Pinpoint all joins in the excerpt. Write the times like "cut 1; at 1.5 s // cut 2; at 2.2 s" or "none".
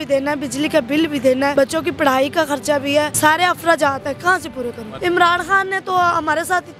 cut 1; at 1.5 s // cut 2; at 3.1 s // cut 3; at 4.9 s